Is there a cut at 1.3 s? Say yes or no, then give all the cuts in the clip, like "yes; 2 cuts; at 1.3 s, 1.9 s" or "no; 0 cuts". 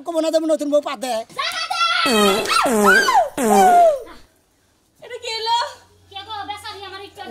yes; 1 cut; at 1.3 s